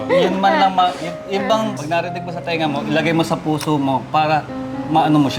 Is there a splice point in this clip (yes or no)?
yes